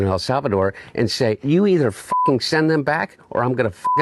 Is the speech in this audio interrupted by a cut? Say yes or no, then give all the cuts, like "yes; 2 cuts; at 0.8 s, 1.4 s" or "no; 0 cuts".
yes; 1 cut; at 1.4 s